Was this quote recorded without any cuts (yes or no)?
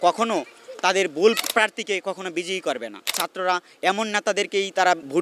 no